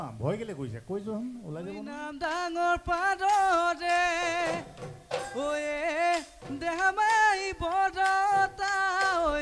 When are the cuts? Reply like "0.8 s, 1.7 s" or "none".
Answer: 2.1 s